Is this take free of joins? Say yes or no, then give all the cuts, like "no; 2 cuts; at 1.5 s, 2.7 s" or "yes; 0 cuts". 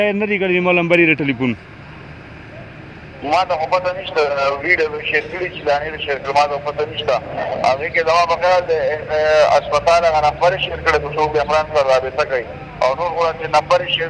yes; 0 cuts